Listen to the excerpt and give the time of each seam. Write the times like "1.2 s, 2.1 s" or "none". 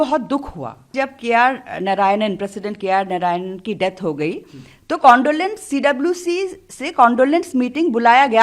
0.9 s